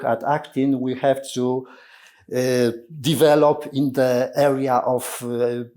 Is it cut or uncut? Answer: uncut